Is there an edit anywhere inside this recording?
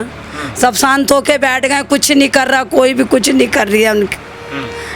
no; 0 cuts

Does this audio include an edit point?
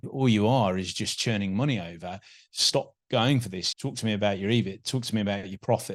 no; 0 cuts

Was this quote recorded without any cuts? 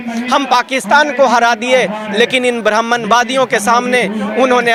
yes; 0 cuts

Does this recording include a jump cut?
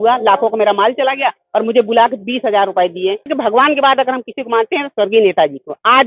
yes; 1 cut; at 3.3 s

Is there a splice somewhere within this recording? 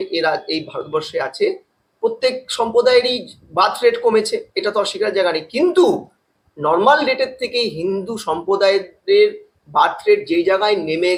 no; 0 cuts

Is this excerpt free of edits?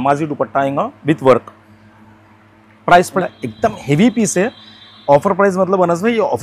no; 1 cut; at 3.1 s

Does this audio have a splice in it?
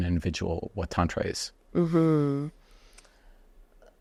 no; 0 cuts

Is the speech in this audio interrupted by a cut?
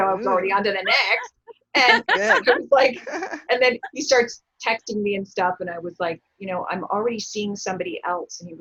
no; 0 cuts

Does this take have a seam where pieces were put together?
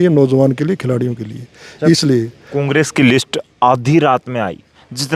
no; 0 cuts

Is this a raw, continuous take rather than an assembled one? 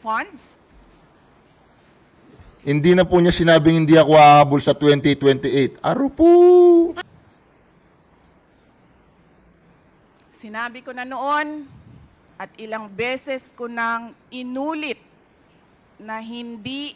no; 1 cut; at 7.0 s

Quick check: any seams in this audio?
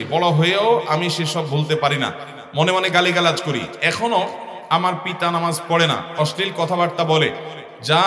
no; 0 cuts

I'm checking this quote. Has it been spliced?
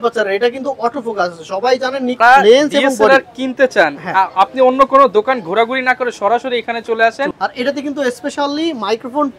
yes; 2 cuts; at 2.2 s, 7.3 s

